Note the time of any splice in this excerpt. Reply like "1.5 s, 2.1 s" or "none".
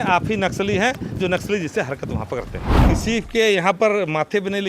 2.9 s